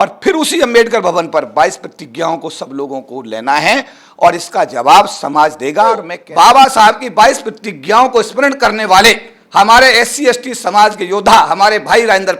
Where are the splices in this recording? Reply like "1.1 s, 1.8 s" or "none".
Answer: 6.2 s